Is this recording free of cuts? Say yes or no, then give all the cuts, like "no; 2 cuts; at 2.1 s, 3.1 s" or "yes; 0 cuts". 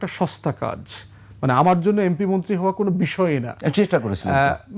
yes; 0 cuts